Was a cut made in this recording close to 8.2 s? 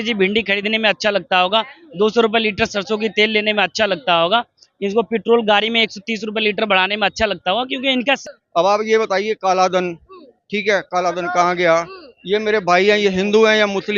yes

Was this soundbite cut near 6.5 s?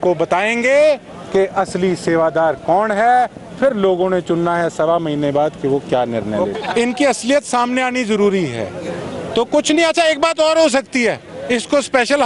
yes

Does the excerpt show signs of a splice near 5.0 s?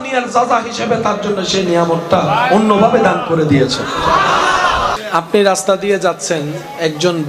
yes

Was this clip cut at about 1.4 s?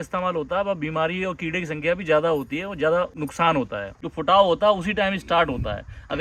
no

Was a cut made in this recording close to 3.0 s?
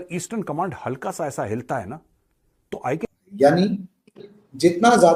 yes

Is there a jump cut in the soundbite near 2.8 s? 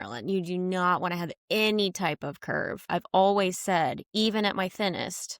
yes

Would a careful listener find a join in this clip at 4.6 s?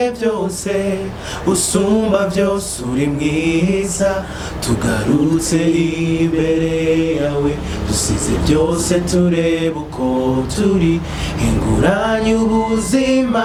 no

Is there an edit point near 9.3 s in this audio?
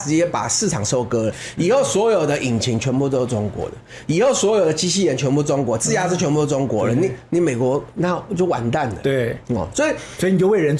no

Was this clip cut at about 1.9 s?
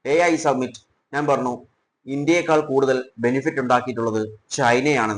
no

